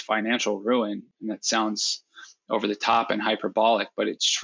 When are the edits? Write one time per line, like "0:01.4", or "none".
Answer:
0:01.1